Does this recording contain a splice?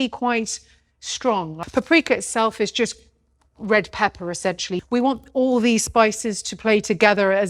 yes; 2 cuts; at 1.6 s, 4.7 s

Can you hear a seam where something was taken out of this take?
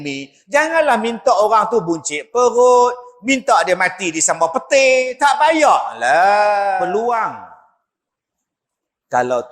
yes; 1 cut; at 6.9 s

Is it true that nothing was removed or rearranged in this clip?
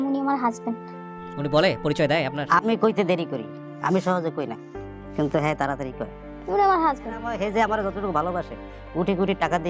no; 1 cut; at 7.3 s

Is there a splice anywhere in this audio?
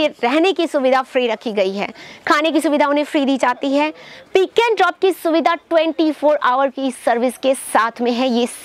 no; 0 cuts

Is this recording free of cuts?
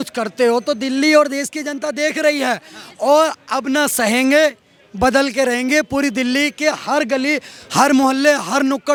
yes; 0 cuts

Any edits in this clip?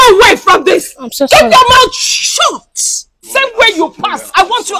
yes; 1 cut; at 3.3 s

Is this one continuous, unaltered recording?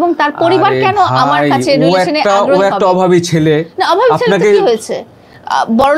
yes; 0 cuts

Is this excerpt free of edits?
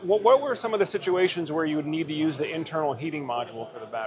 yes; 0 cuts

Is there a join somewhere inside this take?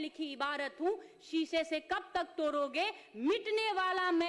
no; 0 cuts

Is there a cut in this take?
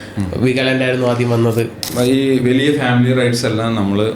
yes; 1 cut; at 1.8 s

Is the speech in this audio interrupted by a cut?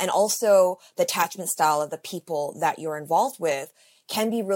no; 0 cuts

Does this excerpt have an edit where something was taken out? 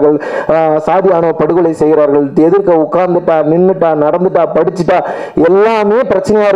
no; 0 cuts

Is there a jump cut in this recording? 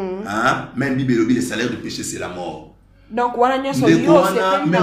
no; 0 cuts

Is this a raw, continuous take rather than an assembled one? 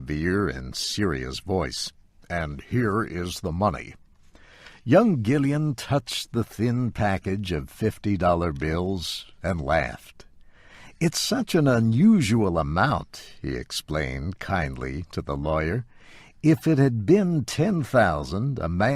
no; 1 cut; at 9.9 s

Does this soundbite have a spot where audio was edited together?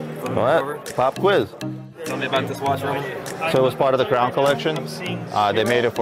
yes; 1 cut; at 2.1 s

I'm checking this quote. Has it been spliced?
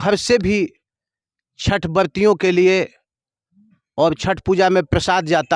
no; 0 cuts

